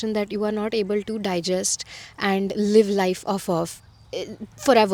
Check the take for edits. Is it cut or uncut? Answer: uncut